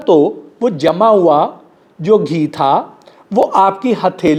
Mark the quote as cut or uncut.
uncut